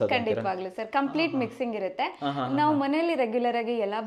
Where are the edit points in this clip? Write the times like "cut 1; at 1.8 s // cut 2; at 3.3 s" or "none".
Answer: none

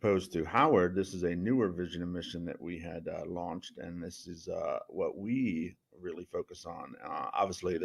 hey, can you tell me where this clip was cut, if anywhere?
none

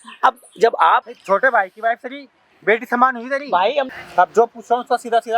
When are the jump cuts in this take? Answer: cut 1; at 1.0 s // cut 2; at 3.9 s

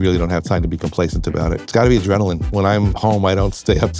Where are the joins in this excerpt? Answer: cut 1; at 1.6 s // cut 2; at 2.4 s

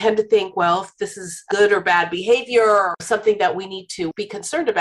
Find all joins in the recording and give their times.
cut 1; at 1.4 s // cut 2; at 3.0 s

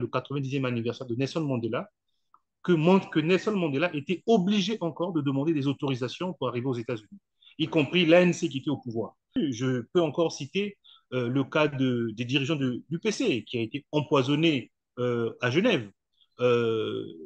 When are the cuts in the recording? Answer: cut 1; at 9.4 s

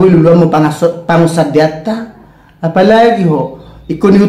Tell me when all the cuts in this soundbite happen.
none

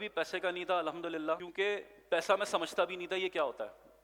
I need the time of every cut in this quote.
cut 1; at 1.5 s

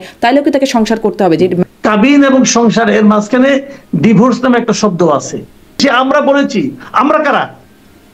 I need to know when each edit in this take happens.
cut 1; at 1.6 s // cut 2; at 5.8 s

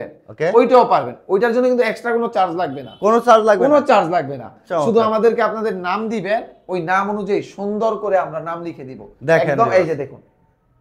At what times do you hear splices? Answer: none

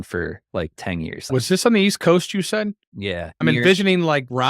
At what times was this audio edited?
cut 1; at 1.2 s // cut 2; at 3.2 s

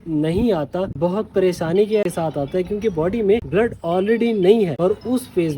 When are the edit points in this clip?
cut 1; at 0.9 s // cut 2; at 2.0 s // cut 3; at 3.5 s // cut 4; at 4.7 s

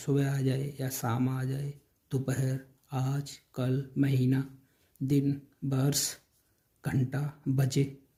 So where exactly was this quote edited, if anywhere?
none

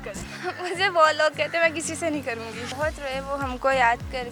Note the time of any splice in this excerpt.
cut 1; at 2.5 s

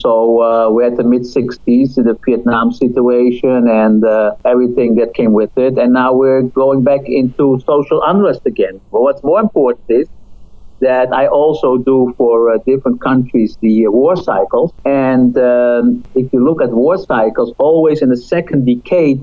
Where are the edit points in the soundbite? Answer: cut 1; at 4.4 s // cut 2; at 14.8 s // cut 3; at 16.0 s

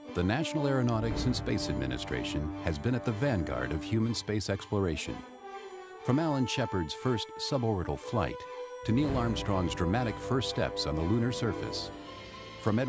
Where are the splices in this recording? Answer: cut 1; at 7.7 s

